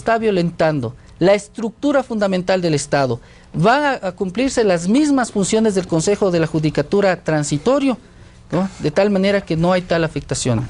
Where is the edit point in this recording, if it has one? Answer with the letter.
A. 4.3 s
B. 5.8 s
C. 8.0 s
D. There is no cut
A